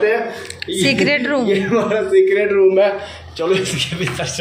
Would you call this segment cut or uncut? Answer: uncut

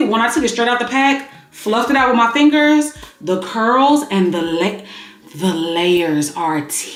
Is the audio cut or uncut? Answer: uncut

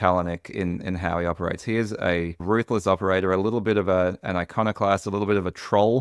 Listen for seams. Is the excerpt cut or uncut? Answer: uncut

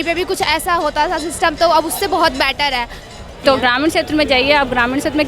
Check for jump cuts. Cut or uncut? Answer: cut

